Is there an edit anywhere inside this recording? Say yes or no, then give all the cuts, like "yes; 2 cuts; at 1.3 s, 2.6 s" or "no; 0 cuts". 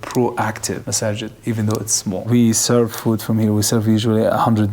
yes; 1 cut; at 2.2 s